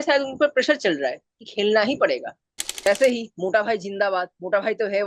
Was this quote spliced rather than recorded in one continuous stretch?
yes; 1 cut; at 2.9 s

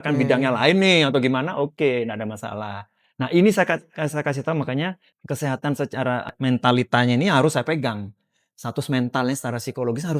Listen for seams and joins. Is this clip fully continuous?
no; 2 cuts; at 5.1 s, 6.3 s

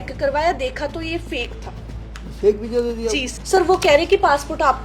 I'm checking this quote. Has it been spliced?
yes; 1 cut; at 3.4 s

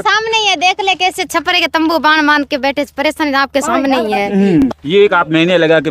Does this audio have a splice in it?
yes; 1 cut; at 4.7 s

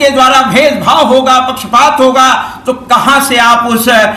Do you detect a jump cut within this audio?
no; 0 cuts

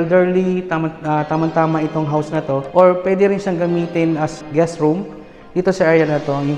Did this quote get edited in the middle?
yes; 2 cuts; at 2.7 s, 4.4 s

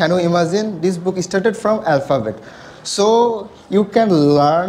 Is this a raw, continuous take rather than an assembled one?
yes; 0 cuts

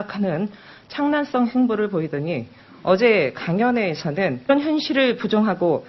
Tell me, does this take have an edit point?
no; 0 cuts

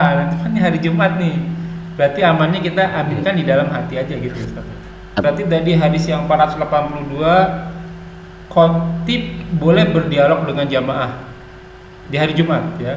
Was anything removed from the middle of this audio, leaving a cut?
yes; 1 cut; at 5.2 s

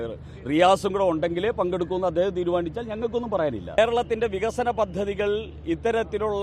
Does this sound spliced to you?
yes; 1 cut; at 3.8 s

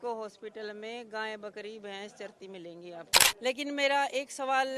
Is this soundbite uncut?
no; 1 cut; at 3.2 s

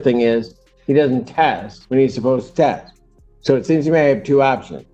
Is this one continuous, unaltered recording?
no; 1 cut; at 1.7 s

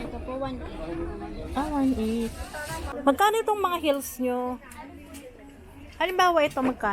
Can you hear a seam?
yes; 1 cut; at 2.9 s

